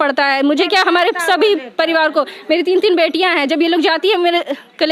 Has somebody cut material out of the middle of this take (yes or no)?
no